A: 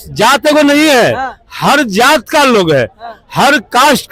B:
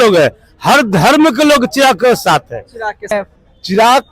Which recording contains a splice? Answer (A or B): B